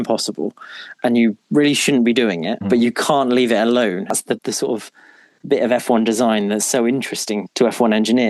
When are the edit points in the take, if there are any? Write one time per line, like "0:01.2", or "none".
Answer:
0:04.1